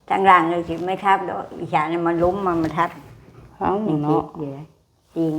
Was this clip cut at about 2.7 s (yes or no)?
yes